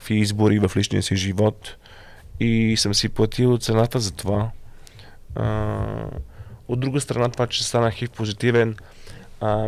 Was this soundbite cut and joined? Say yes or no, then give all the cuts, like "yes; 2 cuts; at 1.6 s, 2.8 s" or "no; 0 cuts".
no; 0 cuts